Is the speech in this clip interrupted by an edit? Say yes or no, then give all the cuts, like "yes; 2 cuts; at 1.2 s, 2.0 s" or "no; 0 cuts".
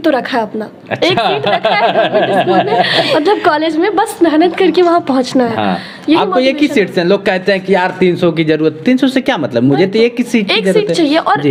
no; 0 cuts